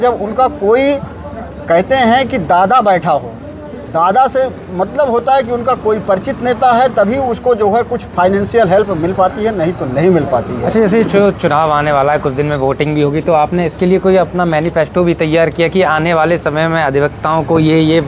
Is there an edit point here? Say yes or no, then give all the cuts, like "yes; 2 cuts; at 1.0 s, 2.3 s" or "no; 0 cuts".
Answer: no; 0 cuts